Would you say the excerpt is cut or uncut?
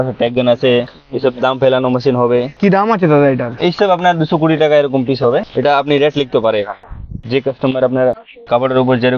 uncut